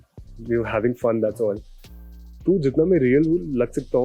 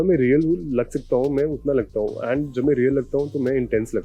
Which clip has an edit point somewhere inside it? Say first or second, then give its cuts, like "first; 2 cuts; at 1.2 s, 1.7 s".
first; 1 cut; at 1.7 s